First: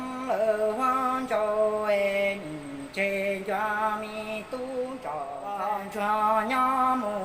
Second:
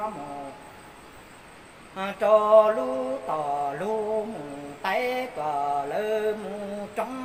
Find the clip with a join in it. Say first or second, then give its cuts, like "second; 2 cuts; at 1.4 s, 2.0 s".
first; 1 cut; at 5.4 s